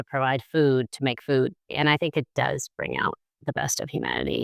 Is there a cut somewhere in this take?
yes; 1 cut; at 1.7 s

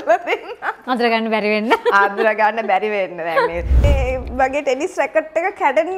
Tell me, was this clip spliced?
yes; 1 cut; at 3.8 s

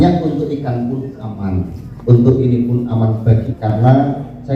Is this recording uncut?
no; 1 cut; at 3.5 s

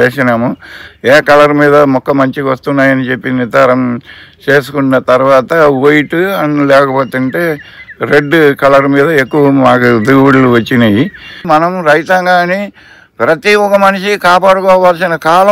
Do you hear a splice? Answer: yes; 1 cut; at 11.3 s

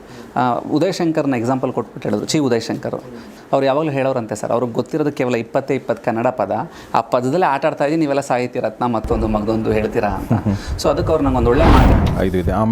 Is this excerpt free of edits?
no; 2 cuts; at 3.3 s, 11.9 s

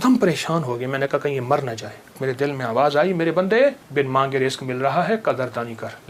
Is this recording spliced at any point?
yes; 2 cuts; at 2.2 s, 3.8 s

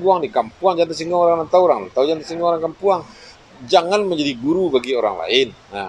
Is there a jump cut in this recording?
no; 0 cuts

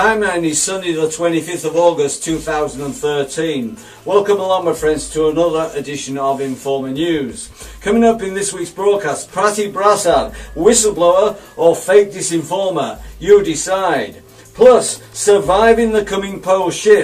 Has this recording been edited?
no; 0 cuts

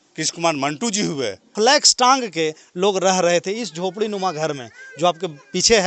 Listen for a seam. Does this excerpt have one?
yes; 1 cut; at 1.5 s

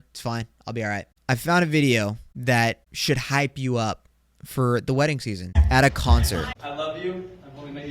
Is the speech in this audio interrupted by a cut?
yes; 5 cuts; at 1.1 s, 2.3 s, 2.9 s, 5.6 s, 6.5 s

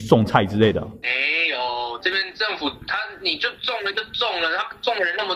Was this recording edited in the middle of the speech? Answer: no; 0 cuts

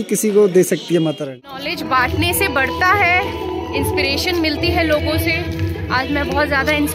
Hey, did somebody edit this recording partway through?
yes; 1 cut; at 1.2 s

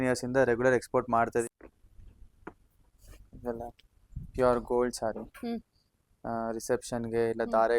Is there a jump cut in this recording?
yes; 1 cut; at 1.4 s

